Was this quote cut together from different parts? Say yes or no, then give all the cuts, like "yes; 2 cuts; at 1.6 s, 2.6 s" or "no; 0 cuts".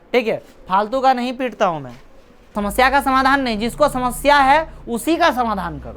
yes; 1 cut; at 2.5 s